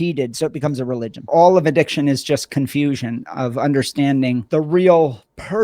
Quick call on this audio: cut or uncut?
cut